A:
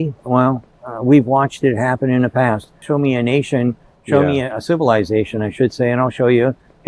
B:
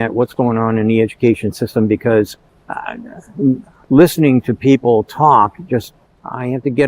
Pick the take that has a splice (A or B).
A